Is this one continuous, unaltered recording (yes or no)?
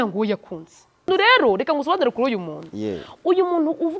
no